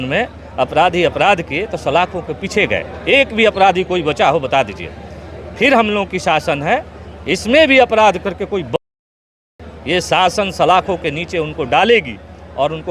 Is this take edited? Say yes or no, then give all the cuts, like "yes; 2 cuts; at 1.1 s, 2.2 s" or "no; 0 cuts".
no; 0 cuts